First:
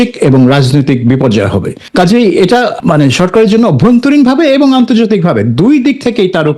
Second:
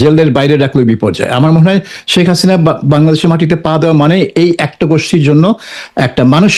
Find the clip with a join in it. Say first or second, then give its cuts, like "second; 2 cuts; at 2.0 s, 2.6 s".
first; 2 cuts; at 1.8 s, 2.8 s